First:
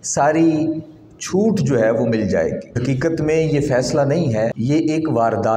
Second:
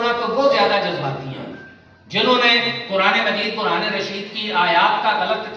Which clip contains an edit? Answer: first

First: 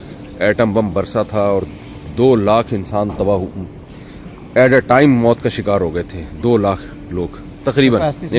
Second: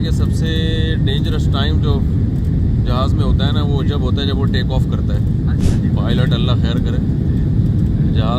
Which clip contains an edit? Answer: second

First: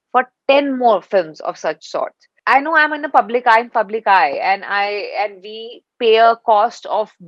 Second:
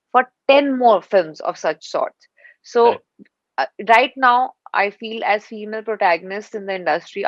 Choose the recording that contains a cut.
first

